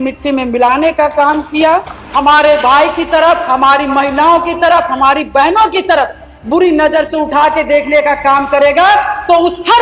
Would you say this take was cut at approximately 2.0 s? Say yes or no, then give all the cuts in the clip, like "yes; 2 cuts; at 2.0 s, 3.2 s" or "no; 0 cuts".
yes; 1 cut; at 2.0 s